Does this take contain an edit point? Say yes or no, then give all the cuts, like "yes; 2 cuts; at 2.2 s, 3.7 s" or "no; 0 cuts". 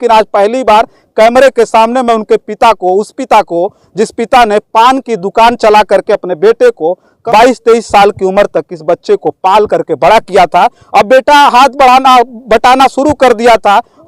yes; 1 cut; at 7.1 s